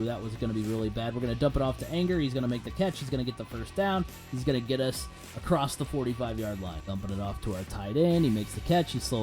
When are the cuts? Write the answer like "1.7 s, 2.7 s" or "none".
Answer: 6.8 s